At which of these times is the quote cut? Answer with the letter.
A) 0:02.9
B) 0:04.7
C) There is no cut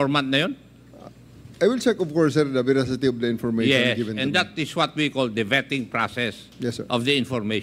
C